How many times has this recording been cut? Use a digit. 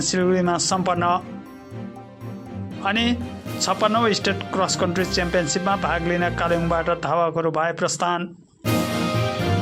1